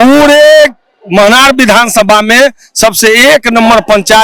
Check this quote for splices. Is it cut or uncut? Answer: uncut